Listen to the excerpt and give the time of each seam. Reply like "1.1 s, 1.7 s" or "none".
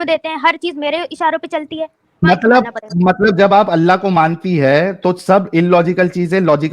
2.2 s